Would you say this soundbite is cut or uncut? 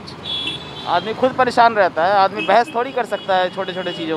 uncut